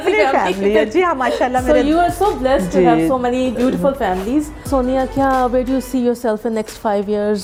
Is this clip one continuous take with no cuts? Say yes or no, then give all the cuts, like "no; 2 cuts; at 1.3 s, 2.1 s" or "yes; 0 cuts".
yes; 0 cuts